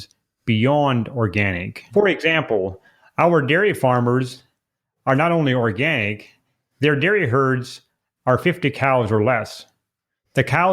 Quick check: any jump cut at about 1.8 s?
yes; 1 cut; at 1.8 s

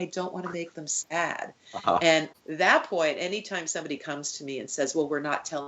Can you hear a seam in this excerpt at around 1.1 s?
no; 1 cut; at 2.4 s

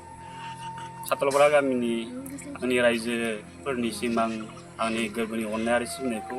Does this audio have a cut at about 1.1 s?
yes; 1 cut; at 1.1 s

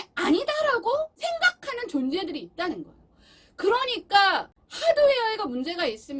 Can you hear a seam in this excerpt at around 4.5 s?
yes; 2 cuts; at 1.1 s, 4.5 s

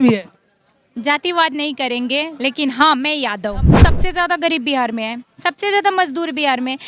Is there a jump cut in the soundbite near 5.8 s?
no; 1 cut; at 3.8 s

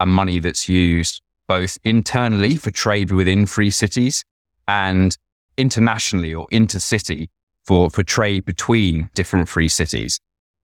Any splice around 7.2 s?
no; 1 cut; at 9.1 s

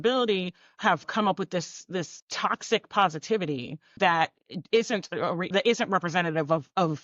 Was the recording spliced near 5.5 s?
yes; 4 cuts; at 1.1 s, 2.2 s, 4.0 s, 5.5 s

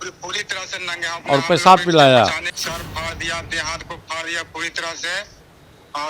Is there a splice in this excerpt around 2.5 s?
yes; 1 cut; at 2.5 s

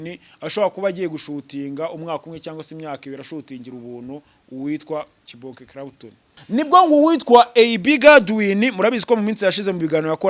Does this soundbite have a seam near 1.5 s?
no; 1 cut; at 6.3 s

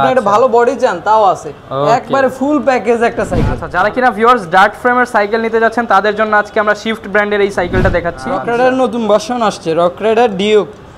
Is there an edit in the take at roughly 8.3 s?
yes; 2 cuts; at 3.6 s, 8.3 s

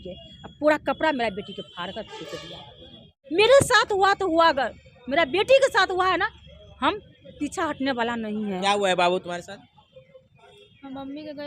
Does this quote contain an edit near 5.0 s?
no; 1 cut; at 3.1 s

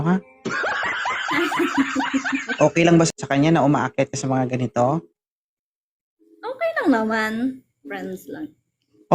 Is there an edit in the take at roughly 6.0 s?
no; 1 cut; at 3.1 s

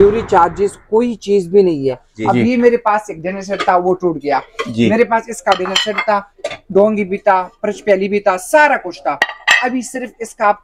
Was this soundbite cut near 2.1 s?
yes; 1 cut; at 2.1 s

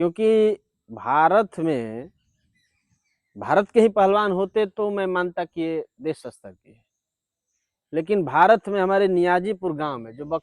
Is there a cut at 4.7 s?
no; 0 cuts

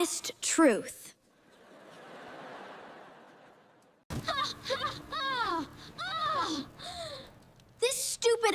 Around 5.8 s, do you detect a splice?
no; 1 cut; at 4.1 s

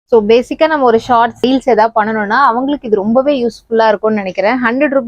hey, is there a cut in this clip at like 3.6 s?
no; 1 cut; at 1.4 s

